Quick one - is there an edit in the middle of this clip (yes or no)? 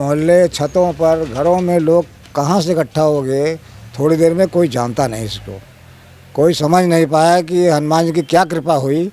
no